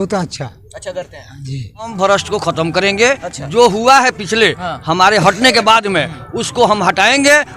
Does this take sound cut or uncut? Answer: cut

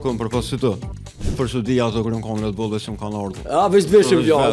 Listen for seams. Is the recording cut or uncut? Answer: cut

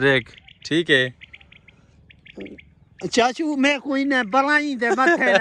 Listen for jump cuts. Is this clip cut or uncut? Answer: uncut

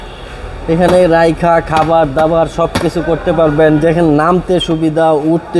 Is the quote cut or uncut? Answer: uncut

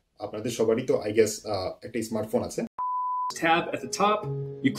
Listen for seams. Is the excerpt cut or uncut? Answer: cut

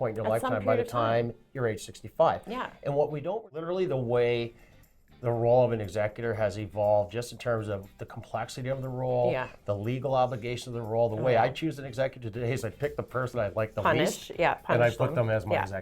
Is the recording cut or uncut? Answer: cut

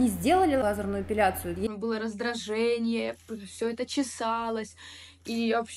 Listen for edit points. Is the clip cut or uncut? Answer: cut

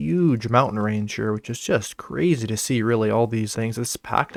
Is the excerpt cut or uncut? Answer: uncut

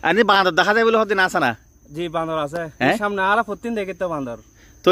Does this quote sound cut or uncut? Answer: uncut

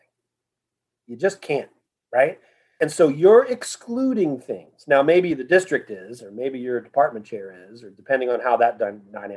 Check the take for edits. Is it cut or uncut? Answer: cut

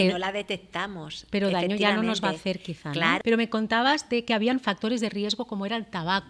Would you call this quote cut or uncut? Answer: cut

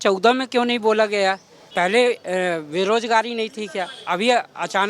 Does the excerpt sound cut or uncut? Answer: cut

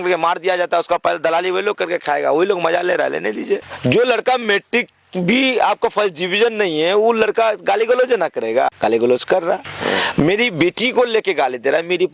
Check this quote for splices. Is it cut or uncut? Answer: cut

